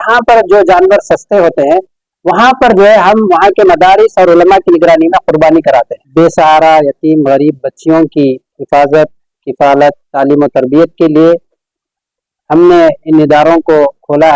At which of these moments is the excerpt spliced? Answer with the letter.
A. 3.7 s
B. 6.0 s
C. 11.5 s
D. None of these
B